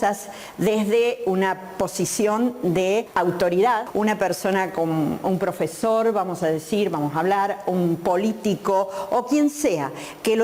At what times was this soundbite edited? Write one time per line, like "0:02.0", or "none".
0:03.1
0:03.9

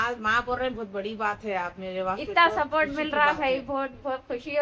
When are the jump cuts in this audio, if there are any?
none

